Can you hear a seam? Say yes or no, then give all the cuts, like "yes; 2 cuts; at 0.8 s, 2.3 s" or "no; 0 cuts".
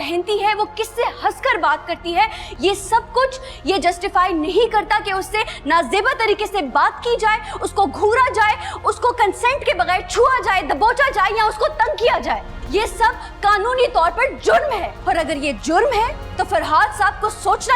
yes; 3 cuts; at 12.5 s, 14.9 s, 16.2 s